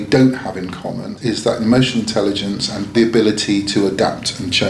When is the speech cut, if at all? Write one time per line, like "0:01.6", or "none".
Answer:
0:01.2
0:02.9